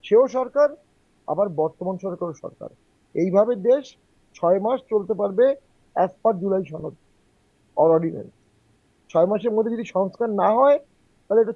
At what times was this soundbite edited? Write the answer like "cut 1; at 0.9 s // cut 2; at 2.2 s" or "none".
none